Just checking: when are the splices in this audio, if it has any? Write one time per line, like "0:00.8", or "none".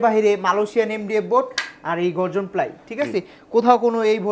none

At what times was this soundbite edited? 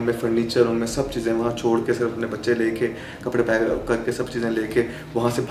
none

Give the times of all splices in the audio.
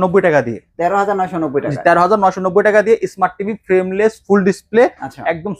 none

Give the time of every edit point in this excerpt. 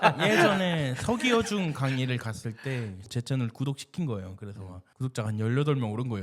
0:03.0

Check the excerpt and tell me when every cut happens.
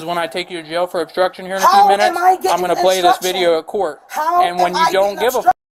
none

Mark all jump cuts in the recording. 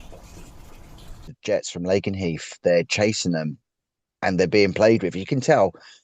0:01.3

